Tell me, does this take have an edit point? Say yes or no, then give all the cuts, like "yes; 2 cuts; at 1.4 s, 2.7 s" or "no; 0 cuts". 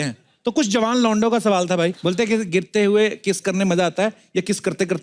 no; 0 cuts